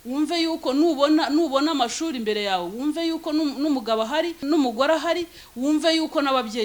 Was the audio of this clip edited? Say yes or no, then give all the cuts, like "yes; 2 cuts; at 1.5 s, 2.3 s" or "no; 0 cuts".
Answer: yes; 1 cut; at 4.4 s